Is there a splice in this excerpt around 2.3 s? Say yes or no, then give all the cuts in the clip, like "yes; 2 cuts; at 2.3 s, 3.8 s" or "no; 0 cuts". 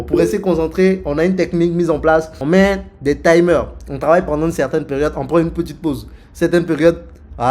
yes; 1 cut; at 2.3 s